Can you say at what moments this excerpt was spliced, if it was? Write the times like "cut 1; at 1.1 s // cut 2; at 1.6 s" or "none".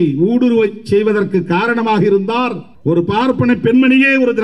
cut 1; at 2.7 s